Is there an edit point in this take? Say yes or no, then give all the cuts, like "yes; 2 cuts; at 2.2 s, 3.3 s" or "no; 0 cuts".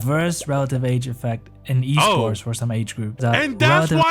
yes; 1 cut; at 3.2 s